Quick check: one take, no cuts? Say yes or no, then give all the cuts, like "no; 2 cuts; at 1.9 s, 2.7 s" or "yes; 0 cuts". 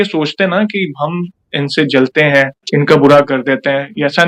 yes; 0 cuts